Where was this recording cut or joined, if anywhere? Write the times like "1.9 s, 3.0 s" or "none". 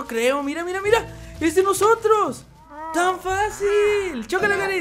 none